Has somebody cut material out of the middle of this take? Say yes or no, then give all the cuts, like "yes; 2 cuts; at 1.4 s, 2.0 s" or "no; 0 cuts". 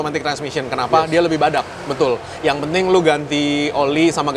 no; 0 cuts